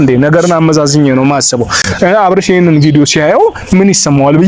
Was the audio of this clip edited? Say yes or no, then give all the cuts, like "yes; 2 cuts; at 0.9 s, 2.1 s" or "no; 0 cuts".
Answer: no; 0 cuts